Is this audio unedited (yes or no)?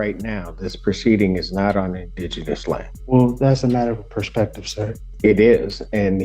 no